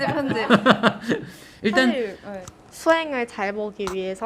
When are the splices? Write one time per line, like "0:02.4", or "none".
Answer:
0:02.3

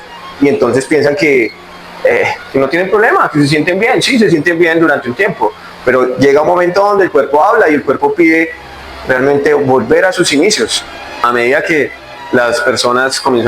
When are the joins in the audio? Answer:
0:11.2

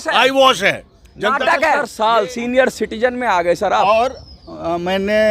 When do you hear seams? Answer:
0:01.9

